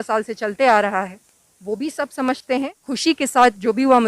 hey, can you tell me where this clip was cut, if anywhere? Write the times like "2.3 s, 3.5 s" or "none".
2.8 s